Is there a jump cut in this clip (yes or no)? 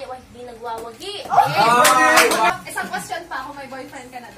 yes